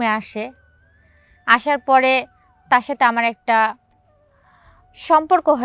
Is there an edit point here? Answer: no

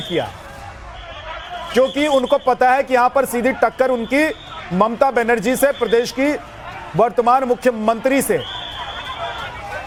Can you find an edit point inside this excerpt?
no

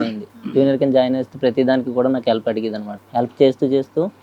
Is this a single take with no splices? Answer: no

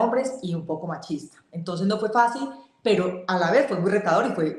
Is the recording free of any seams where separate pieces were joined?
yes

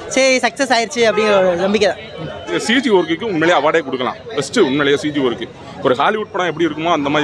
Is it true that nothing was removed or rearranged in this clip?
no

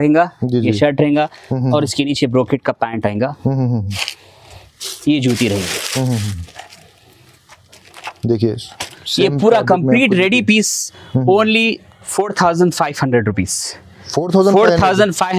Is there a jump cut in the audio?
no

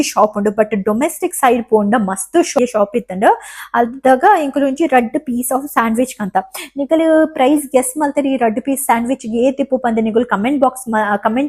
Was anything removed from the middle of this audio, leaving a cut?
yes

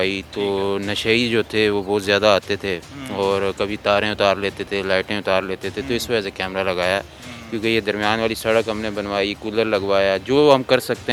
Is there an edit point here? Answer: no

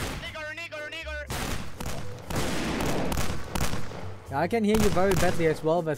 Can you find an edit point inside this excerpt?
no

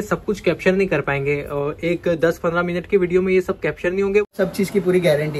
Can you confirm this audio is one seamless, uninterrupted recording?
no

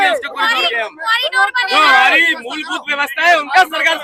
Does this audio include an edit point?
no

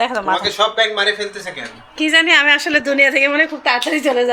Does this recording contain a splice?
no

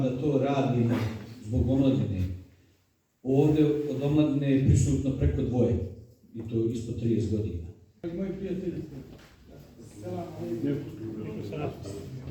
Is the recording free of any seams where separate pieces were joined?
no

